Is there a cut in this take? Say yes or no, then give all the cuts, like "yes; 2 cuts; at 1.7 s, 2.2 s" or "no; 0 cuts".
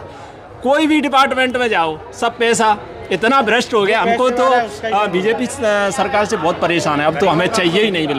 no; 0 cuts